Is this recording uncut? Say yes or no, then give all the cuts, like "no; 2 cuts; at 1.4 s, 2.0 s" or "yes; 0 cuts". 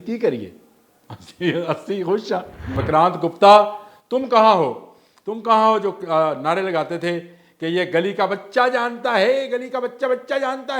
no; 1 cut; at 2.8 s